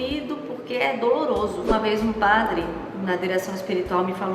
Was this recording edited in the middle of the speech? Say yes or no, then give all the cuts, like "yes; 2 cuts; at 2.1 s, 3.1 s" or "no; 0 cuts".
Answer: yes; 1 cut; at 1.7 s